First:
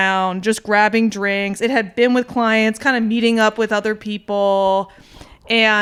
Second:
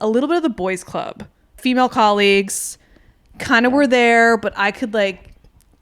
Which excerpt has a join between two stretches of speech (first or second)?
second